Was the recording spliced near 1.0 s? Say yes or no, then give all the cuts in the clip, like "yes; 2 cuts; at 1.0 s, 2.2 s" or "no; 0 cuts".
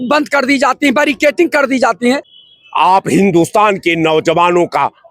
no; 1 cut; at 2.3 s